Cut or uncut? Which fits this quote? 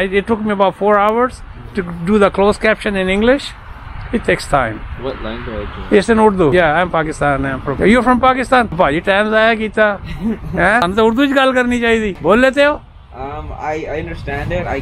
cut